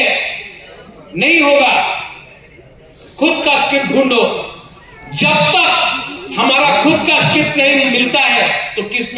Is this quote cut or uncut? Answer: uncut